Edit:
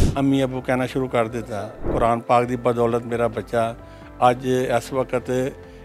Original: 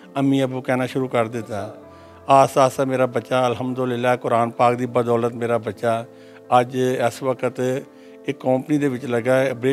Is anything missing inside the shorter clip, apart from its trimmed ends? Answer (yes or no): yes